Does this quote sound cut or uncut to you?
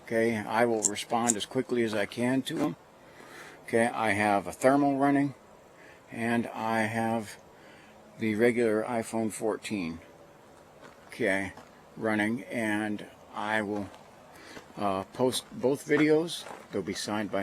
cut